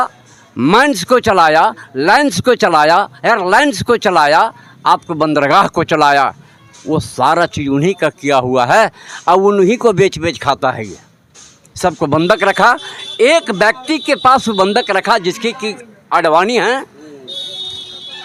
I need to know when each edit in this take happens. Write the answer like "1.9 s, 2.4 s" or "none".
none